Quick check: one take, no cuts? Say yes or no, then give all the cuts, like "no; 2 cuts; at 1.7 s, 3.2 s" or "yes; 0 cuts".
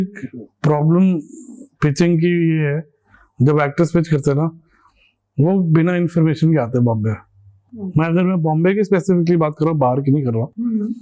yes; 0 cuts